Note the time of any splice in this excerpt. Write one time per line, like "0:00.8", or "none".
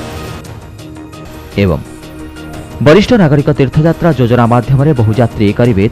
0:01.0